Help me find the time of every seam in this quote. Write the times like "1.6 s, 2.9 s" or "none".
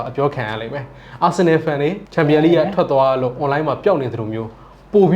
2.0 s